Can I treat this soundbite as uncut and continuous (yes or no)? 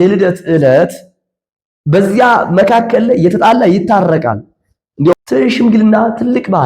no